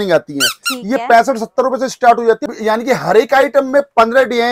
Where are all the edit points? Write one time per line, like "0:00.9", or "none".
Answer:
0:02.5